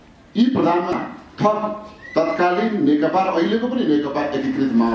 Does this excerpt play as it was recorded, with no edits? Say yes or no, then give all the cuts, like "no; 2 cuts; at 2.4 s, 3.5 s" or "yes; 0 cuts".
no; 1 cut; at 0.9 s